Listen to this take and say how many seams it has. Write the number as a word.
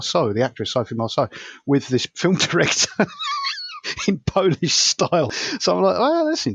one